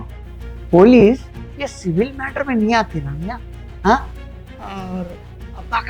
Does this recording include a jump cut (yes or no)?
no